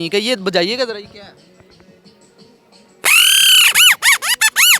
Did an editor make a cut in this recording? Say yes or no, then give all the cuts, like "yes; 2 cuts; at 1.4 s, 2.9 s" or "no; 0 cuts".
no; 0 cuts